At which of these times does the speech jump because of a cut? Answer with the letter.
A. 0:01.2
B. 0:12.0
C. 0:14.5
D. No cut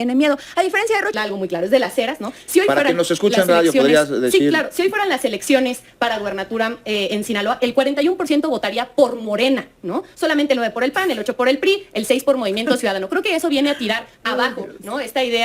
A